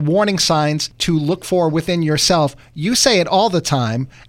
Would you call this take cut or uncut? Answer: cut